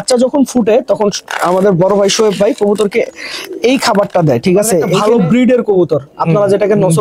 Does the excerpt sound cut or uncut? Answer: cut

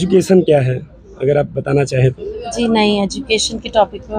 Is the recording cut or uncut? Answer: uncut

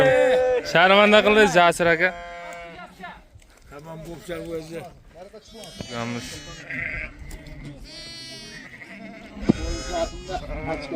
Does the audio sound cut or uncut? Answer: cut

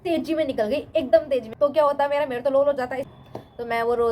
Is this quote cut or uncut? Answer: cut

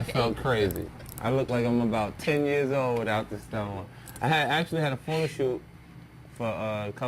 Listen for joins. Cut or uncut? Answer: cut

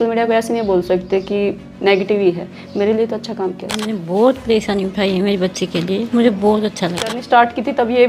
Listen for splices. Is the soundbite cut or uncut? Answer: cut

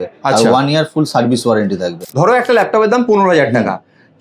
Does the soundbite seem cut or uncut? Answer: cut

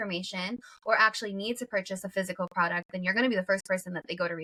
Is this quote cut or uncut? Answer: uncut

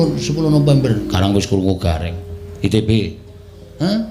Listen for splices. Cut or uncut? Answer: uncut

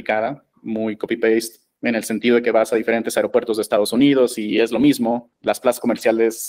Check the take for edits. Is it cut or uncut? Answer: cut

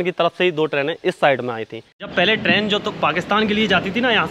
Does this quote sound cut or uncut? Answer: cut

